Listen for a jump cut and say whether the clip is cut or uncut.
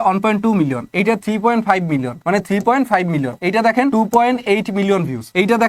uncut